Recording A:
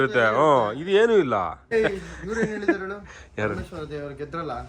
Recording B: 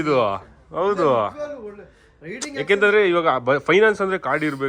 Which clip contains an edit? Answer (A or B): A